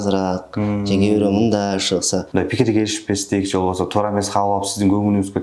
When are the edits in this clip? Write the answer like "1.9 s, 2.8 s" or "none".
2.3 s